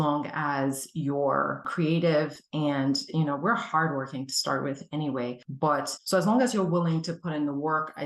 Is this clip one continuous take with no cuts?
yes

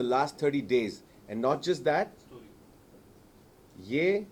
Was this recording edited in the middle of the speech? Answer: no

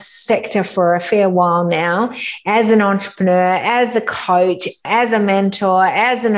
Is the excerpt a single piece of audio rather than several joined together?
no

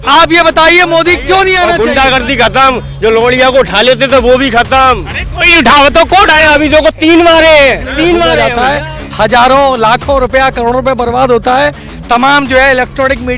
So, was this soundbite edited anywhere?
yes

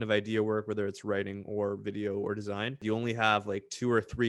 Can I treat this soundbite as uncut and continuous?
no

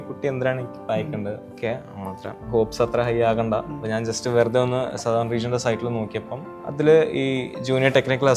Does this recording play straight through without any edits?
no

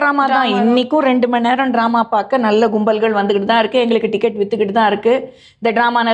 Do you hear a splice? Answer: no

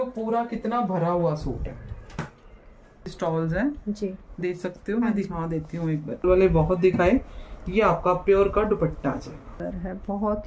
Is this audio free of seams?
no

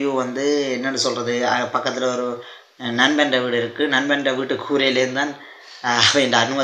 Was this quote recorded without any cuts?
yes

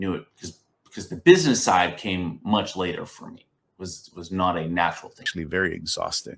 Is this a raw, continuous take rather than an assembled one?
no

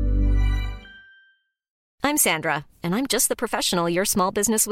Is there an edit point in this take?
yes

